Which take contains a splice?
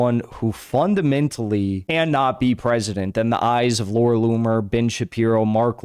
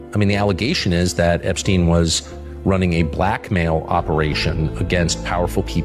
first; 1 cut; at 1.8 s

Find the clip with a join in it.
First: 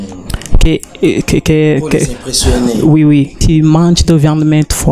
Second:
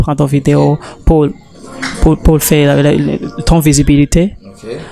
first; 1 cut; at 3.4 s

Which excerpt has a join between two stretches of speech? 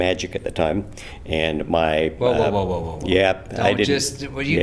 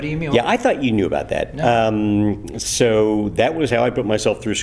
first; 1 cut; at 2.9 s

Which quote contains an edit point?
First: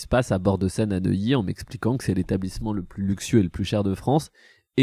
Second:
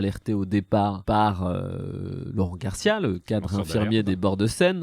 second; 1 cut; at 1.0 s

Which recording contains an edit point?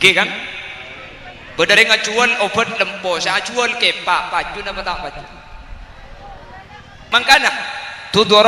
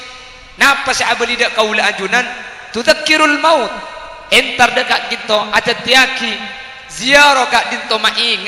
first; 1 cut; at 6.9 s

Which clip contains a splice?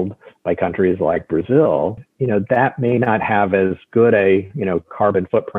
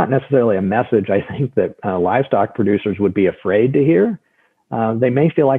first; 1 cut; at 2.1 s

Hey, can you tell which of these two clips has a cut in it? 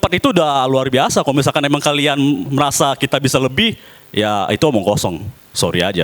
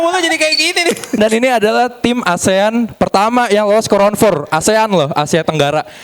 second; 1 cut; at 1.2 s

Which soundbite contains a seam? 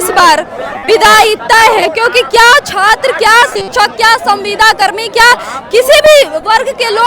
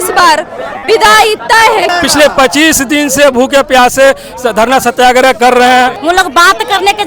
second; 2 cuts; at 1.9 s, 6.0 s

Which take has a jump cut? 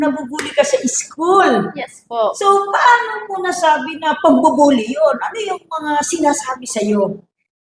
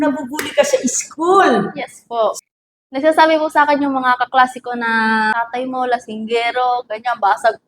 second; 2 cuts; at 2.4 s, 5.3 s

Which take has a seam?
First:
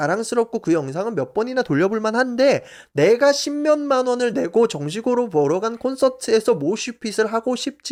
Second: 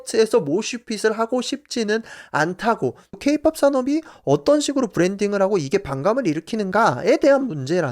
second; 1 cut; at 3.2 s

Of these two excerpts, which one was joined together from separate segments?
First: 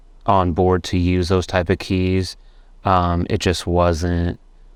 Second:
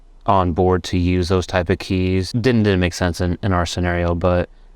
second; 1 cut; at 2.3 s

